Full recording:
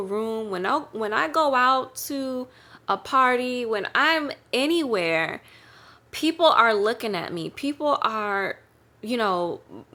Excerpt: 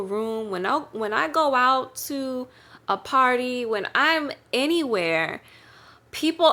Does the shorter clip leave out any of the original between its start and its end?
no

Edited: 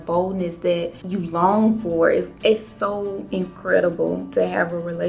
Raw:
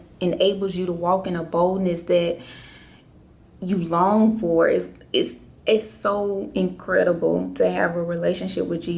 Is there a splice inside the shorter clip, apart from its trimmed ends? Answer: yes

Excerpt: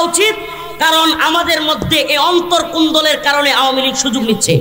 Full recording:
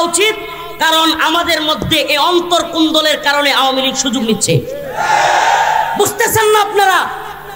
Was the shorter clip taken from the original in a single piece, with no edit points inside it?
yes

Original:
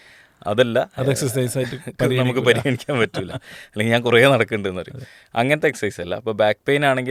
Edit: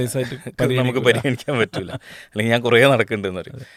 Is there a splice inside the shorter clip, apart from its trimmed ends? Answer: no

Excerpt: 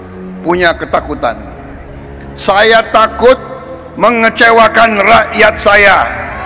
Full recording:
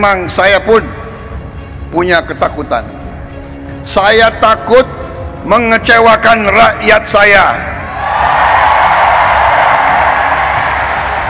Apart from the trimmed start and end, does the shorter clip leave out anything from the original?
no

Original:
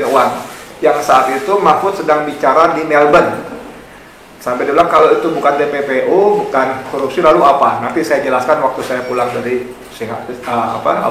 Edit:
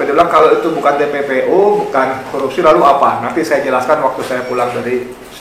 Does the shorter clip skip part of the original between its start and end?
no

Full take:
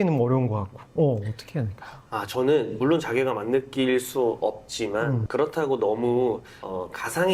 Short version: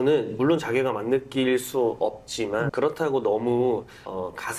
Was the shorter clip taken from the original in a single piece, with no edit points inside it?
no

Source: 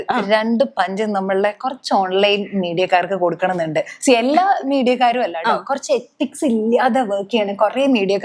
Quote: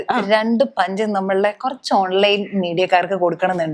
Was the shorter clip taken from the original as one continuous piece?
yes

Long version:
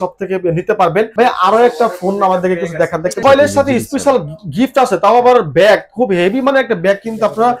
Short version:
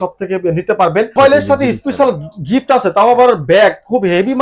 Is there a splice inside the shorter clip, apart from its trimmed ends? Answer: yes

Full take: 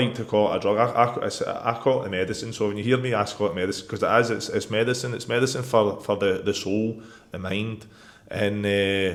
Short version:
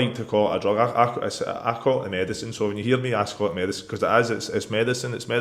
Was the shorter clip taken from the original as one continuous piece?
yes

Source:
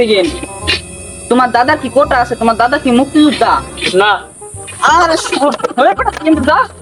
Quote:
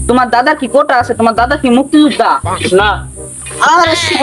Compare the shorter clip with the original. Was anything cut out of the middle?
no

